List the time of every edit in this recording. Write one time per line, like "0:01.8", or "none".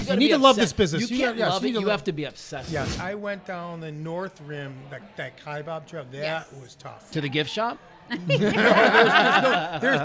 0:03.0